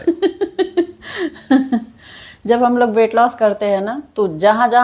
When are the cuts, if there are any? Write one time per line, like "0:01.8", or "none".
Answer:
none

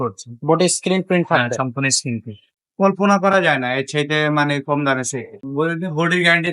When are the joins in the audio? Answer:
0:02.4
0:05.3

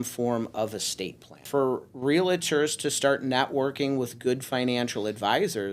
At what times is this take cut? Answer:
0:01.5

